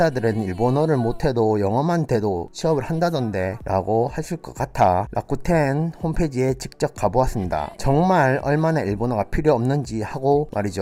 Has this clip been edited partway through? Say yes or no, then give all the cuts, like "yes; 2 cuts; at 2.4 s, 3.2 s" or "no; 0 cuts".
no; 0 cuts